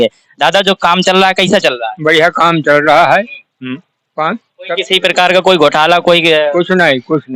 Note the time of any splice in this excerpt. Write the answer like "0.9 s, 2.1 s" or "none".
none